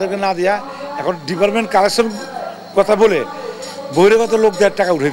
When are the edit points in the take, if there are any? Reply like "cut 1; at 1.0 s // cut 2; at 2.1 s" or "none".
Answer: none